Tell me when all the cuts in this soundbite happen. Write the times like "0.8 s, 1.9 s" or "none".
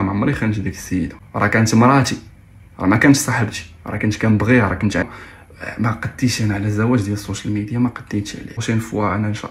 1.2 s, 5.0 s, 8.6 s